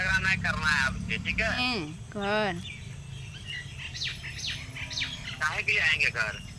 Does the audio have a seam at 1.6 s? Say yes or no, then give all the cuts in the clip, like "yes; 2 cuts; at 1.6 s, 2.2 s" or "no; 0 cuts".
yes; 1 cut; at 1.6 s